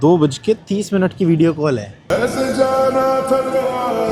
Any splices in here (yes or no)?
no